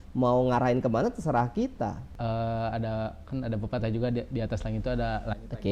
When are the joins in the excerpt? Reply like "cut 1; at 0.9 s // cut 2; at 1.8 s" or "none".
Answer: cut 1; at 2.0 s